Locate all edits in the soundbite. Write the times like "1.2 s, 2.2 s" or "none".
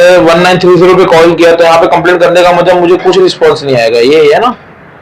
none